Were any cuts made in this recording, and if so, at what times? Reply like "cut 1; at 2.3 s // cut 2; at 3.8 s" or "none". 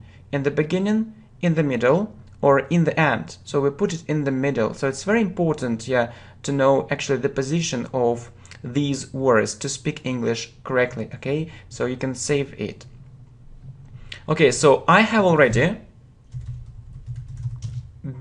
cut 1; at 12.0 s